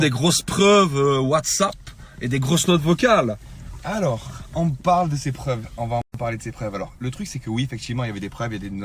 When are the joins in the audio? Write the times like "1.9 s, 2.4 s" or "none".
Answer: none